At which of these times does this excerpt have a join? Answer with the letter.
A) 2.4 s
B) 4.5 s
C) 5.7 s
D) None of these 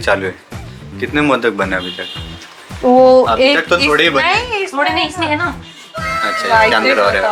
D